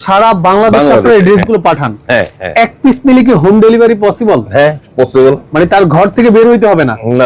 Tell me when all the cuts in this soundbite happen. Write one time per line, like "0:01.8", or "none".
none